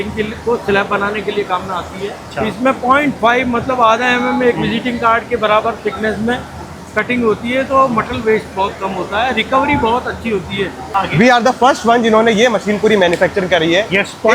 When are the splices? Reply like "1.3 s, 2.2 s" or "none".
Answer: 2.2 s, 10.8 s